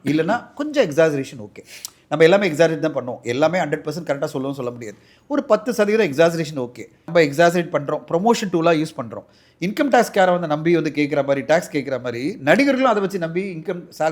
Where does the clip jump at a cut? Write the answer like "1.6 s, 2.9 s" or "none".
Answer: 7.0 s